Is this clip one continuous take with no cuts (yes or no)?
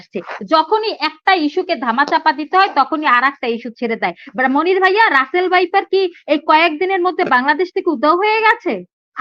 yes